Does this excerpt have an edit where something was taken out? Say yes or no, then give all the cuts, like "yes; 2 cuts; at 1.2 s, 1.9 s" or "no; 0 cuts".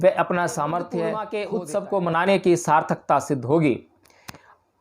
yes; 1 cut; at 1.3 s